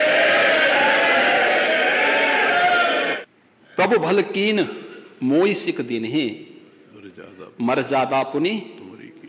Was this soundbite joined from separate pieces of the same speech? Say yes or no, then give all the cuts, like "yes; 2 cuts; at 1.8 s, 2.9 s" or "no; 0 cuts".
yes; 1 cut; at 3.2 s